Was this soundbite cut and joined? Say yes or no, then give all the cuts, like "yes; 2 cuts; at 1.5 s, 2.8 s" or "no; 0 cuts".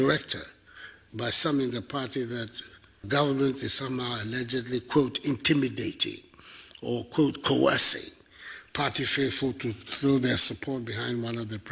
no; 0 cuts